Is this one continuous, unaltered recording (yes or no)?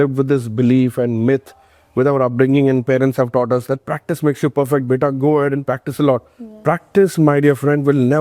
yes